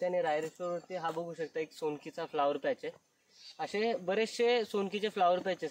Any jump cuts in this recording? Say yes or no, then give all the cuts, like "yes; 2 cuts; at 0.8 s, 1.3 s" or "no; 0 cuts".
no; 0 cuts